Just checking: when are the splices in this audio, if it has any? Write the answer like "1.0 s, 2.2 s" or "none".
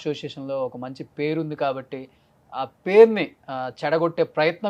none